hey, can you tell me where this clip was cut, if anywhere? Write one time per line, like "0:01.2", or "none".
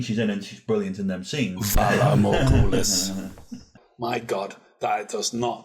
0:03.8